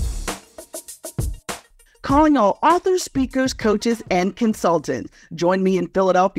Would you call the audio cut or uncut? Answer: cut